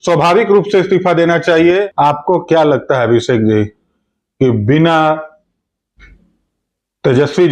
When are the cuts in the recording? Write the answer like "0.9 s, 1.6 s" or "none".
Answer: 1.9 s